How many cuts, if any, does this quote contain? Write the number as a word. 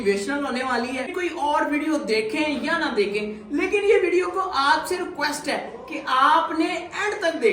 one